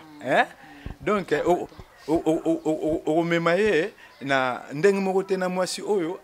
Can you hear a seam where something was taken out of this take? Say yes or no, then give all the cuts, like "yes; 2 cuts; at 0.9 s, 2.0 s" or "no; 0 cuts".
no; 0 cuts